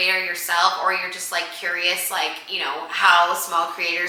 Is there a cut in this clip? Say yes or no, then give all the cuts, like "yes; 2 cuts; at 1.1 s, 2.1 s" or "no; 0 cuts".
no; 0 cuts